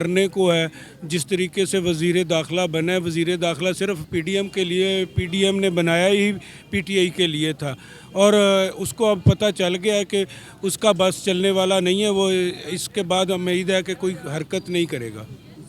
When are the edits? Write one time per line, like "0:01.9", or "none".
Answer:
none